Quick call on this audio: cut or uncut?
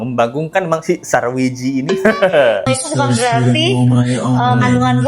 cut